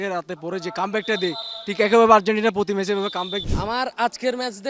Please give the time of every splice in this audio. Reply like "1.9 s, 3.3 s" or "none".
3.4 s